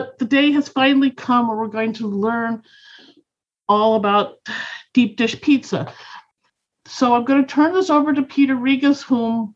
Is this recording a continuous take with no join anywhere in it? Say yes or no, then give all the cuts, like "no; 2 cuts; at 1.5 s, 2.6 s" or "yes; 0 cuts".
no; 1 cut; at 6.3 s